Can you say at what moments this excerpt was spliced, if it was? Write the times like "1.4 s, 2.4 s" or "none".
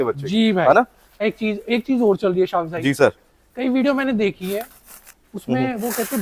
1.2 s

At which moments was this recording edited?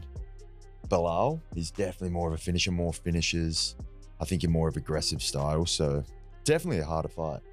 none

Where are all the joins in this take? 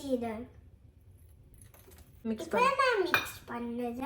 2.2 s

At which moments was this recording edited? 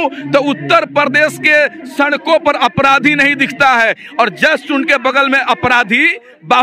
none

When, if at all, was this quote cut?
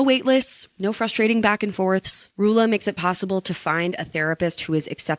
none

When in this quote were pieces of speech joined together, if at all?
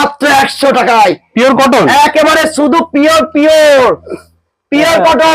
none

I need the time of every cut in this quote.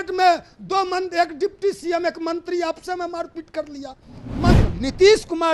4.5 s

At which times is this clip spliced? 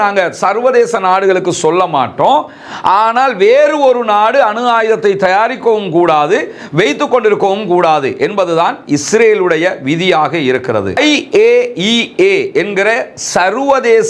10.9 s

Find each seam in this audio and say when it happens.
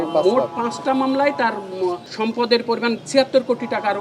2.1 s, 3.0 s

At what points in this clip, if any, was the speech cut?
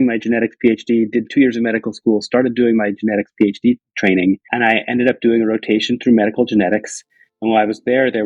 4.5 s

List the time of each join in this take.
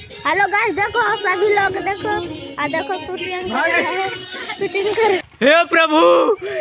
5.2 s

